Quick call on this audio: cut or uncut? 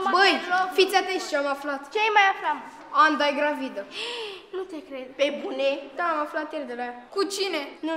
uncut